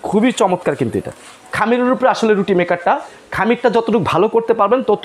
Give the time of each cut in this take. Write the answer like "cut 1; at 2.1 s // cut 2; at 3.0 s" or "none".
cut 1; at 1.5 s